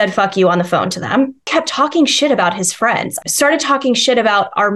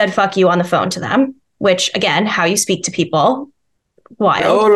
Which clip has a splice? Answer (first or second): first